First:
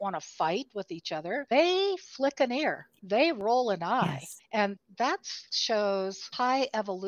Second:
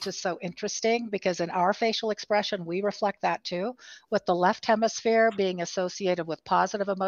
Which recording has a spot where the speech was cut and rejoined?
first; 4 cuts; at 1.5 s, 2.9 s, 4.6 s, 6.2 s

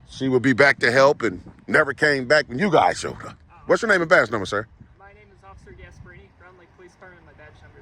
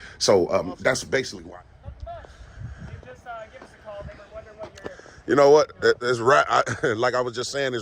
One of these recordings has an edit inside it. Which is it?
second; 1 cut; at 1.3 s

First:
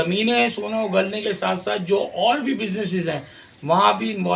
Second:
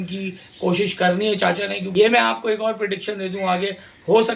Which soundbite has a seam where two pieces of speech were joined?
second; 1 cut; at 1.8 s

